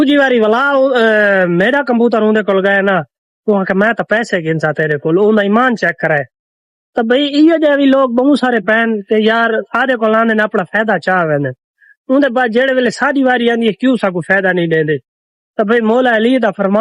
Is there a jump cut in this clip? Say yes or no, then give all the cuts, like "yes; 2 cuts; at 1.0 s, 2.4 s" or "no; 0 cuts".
no; 0 cuts